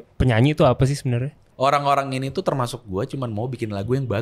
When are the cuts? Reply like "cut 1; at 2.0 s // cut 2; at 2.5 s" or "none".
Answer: cut 1; at 1.5 s